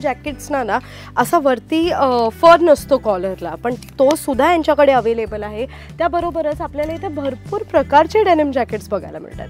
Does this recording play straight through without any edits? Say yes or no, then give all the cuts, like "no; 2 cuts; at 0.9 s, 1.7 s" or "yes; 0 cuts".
yes; 0 cuts